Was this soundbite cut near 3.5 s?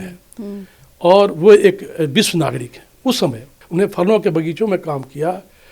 yes; 1 cut; at 3.5 s

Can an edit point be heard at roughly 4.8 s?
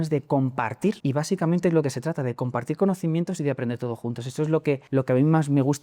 yes; 2 cuts; at 1.0 s, 4.8 s

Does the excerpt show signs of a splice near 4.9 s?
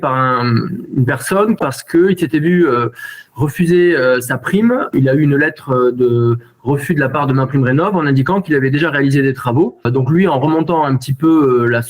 yes; 3 cuts; at 1.6 s, 4.9 s, 9.9 s

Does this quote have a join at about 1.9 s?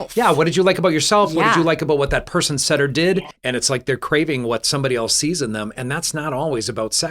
no; 1 cut; at 3.4 s

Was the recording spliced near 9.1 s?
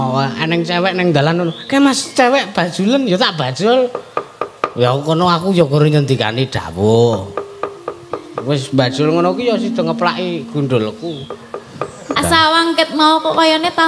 no; 1 cut; at 12.2 s

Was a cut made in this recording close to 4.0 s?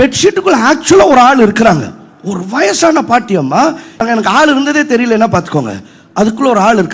yes; 1 cut; at 4.0 s

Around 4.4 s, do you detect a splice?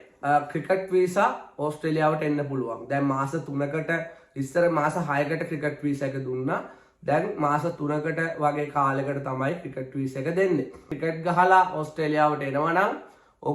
no; 1 cut; at 10.9 s

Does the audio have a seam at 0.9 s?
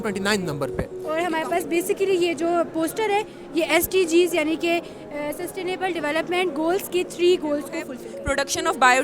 yes; 2 cuts; at 0.9 s, 7.8 s

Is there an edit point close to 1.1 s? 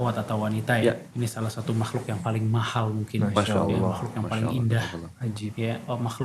yes; 1 cut; at 1.1 s

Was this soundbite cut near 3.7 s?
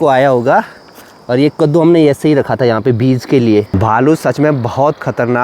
yes; 1 cut; at 3.7 s

